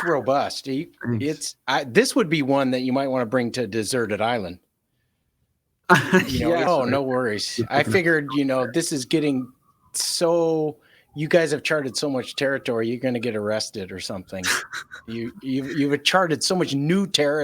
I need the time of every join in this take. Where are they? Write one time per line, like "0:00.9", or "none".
0:06.7